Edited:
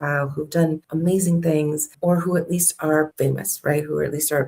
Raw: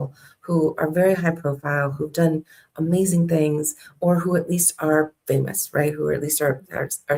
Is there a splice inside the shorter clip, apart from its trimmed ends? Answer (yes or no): yes